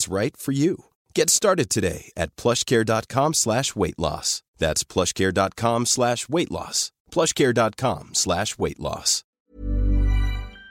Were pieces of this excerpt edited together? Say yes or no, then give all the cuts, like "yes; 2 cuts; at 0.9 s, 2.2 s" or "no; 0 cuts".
yes; 1 cut; at 9.3 s